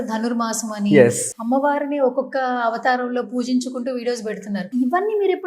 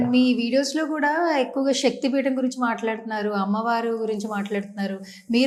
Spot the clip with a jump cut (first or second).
first